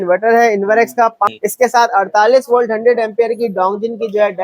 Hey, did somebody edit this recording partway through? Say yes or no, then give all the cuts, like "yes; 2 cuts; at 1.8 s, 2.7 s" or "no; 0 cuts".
yes; 1 cut; at 1.3 s